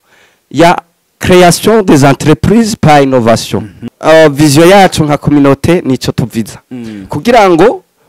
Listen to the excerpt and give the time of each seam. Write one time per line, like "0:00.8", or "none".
0:03.9